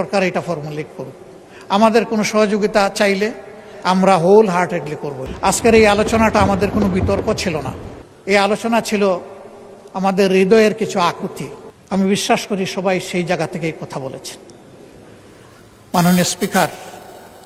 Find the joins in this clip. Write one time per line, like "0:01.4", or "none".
none